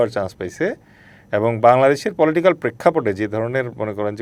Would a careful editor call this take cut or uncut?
uncut